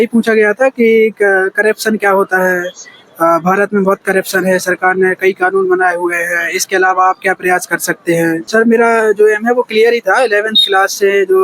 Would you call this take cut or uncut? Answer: cut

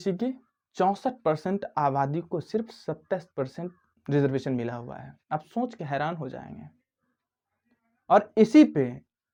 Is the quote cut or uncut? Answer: uncut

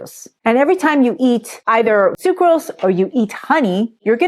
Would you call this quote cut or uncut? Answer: cut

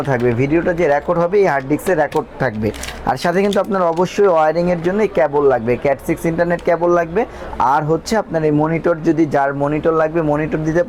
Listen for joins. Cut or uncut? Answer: uncut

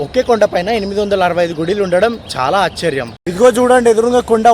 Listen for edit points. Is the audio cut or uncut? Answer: cut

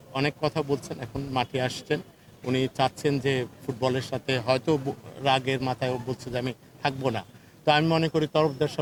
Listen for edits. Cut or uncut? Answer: uncut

